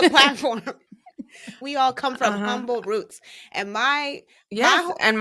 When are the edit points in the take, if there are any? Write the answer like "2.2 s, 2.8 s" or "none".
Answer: 1.6 s